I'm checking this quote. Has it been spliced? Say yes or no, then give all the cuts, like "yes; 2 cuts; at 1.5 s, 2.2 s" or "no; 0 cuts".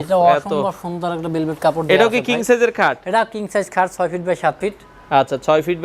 no; 0 cuts